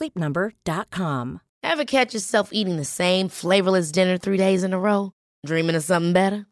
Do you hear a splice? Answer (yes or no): yes